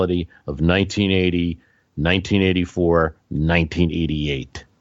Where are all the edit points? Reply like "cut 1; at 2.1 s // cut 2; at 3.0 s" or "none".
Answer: none